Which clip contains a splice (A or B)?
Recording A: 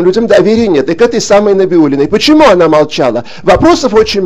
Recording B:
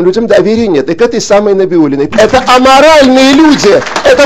B